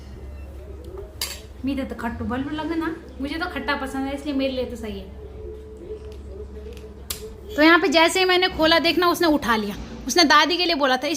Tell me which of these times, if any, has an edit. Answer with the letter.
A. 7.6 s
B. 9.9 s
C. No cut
A